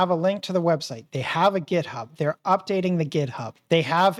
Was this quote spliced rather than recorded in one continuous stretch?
no; 0 cuts

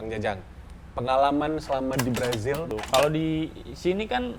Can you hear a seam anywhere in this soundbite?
yes; 1 cut; at 2.7 s

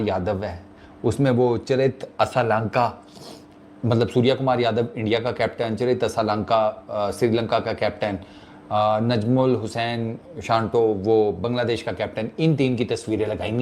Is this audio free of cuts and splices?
yes; 0 cuts

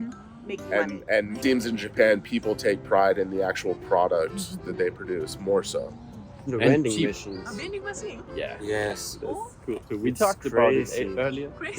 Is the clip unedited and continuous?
no; 2 cuts; at 1.4 s, 6.5 s

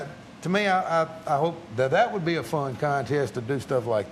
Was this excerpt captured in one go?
yes; 0 cuts

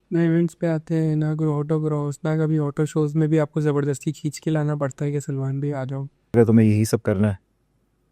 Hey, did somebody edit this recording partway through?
yes; 1 cut; at 6.3 s

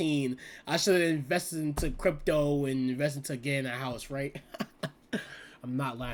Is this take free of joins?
yes; 0 cuts

